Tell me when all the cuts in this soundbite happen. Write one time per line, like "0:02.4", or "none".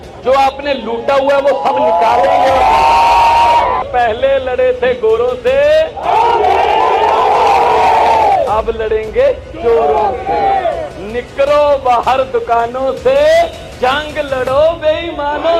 0:03.9